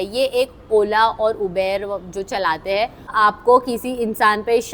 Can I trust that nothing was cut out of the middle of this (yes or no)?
no